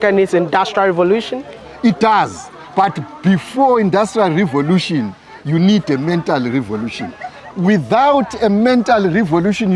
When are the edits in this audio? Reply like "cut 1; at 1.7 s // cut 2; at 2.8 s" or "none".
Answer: cut 1; at 1.6 s